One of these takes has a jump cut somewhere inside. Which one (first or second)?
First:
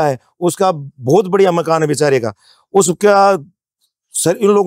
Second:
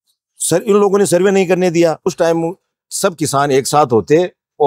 second